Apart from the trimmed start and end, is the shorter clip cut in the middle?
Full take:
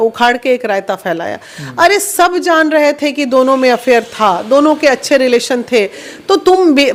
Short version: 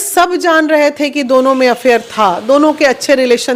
no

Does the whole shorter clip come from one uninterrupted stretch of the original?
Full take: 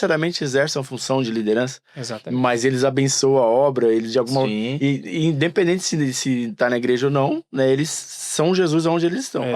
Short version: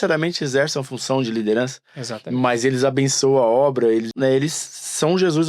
no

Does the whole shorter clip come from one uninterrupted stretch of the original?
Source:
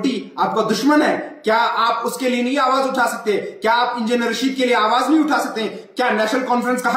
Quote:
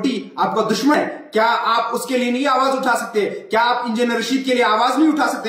no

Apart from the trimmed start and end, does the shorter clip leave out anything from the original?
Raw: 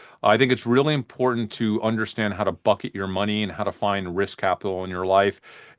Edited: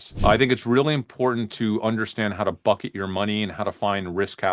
no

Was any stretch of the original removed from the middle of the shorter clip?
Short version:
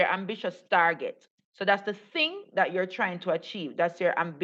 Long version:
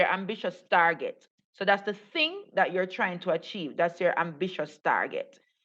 no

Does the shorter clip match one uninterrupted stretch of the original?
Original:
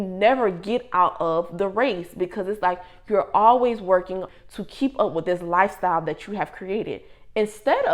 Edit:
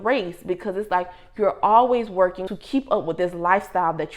no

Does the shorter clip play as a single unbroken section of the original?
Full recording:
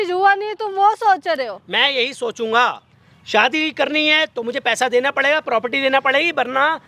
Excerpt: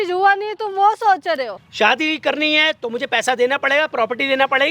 no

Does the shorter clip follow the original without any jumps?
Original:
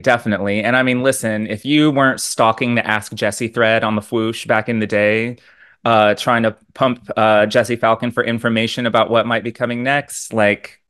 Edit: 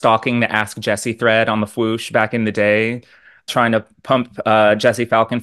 no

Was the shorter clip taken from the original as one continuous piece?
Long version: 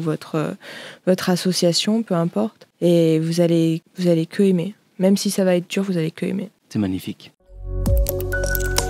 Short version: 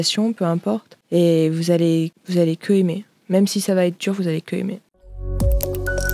no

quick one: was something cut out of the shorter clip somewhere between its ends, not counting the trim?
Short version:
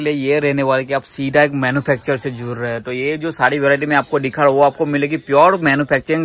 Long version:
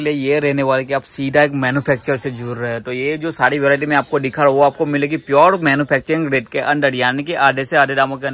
no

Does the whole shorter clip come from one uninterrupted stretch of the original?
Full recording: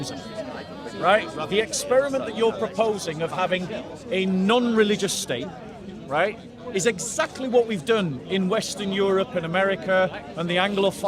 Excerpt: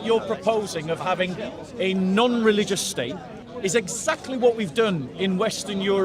no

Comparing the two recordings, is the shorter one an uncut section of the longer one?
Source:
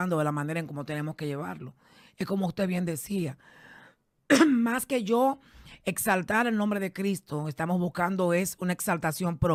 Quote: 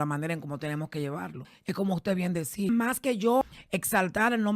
no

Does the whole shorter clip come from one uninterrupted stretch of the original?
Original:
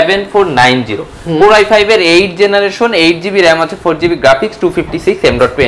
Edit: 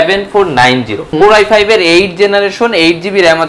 no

